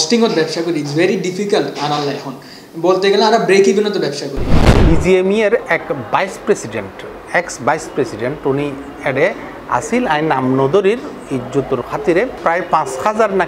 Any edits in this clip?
yes; 1 cut; at 4.7 s

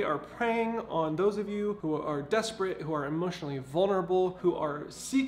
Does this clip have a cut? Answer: yes; 2 cuts; at 1.8 s, 4.4 s

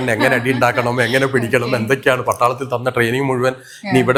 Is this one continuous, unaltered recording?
yes; 0 cuts

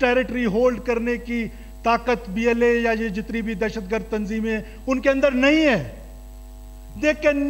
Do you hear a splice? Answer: no; 0 cuts

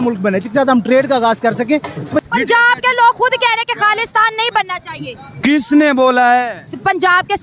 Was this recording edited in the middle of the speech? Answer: yes; 1 cut; at 2.2 s

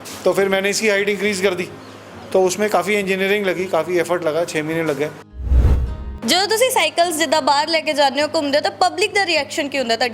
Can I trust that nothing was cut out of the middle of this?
no; 1 cut; at 5.5 s

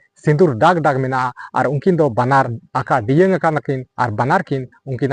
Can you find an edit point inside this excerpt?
yes; 1 cut; at 2.6 s

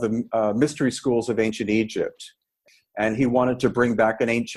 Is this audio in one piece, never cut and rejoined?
no; 1 cut; at 2.6 s

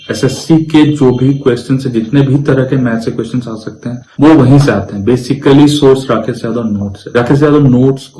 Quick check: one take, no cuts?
yes; 0 cuts

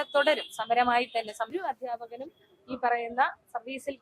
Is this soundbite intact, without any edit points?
no; 1 cut; at 1.5 s

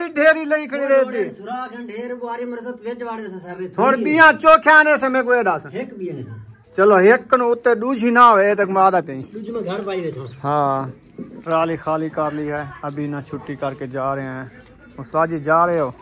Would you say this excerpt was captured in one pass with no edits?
yes; 0 cuts

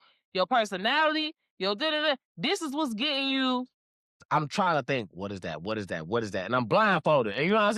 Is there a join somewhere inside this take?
yes; 1 cut; at 4.2 s

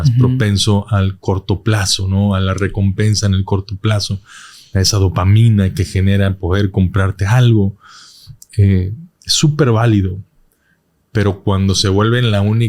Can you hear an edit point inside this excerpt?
no; 0 cuts

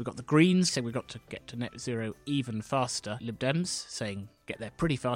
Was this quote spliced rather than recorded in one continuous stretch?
yes; 2 cuts; at 0.7 s, 3.2 s

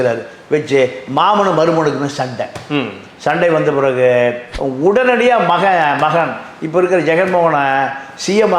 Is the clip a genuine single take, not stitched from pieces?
no; 1 cut; at 4.5 s

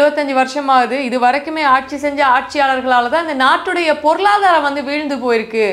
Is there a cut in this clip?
no; 0 cuts

